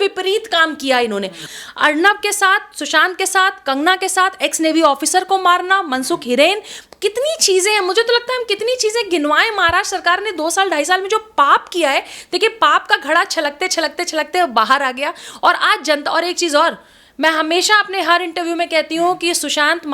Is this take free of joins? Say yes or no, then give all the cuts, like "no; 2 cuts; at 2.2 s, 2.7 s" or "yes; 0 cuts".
no; 1 cut; at 1.4 s